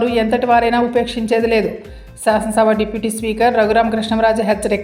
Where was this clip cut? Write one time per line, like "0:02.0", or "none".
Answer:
none